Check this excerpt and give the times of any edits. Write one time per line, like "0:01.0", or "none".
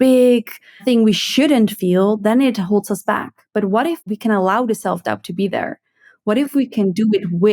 0:00.8
0:04.0